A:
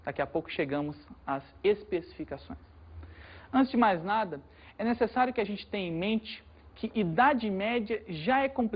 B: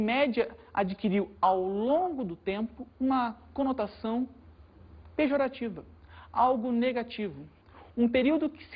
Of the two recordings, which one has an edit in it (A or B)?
A